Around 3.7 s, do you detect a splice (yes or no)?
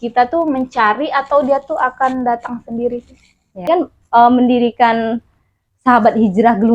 yes